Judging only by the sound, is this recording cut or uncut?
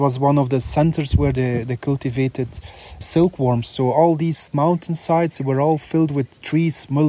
cut